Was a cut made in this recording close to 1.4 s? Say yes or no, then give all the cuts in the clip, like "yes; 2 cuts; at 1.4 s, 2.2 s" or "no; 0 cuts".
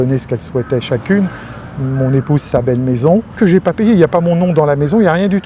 no; 0 cuts